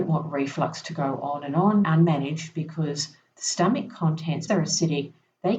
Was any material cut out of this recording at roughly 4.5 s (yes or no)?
yes